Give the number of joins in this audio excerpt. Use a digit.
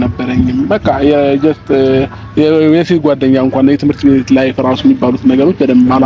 0